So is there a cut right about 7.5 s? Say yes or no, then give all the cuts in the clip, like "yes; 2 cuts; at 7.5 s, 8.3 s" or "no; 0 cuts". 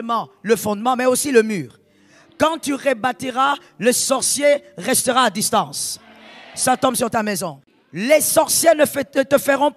yes; 1 cut; at 7.5 s